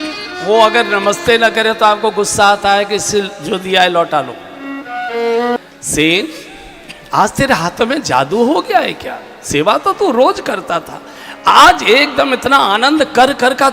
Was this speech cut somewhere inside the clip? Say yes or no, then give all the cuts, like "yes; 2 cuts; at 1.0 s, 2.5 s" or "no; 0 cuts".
yes; 1 cut; at 5.6 s